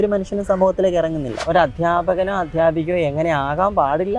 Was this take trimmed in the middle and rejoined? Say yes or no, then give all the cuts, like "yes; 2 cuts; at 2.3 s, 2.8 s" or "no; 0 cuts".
yes; 1 cut; at 1.4 s